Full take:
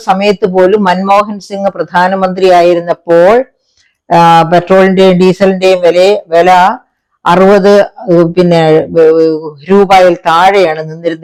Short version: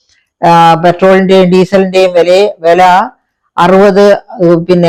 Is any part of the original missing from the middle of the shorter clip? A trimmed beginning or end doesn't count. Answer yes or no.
no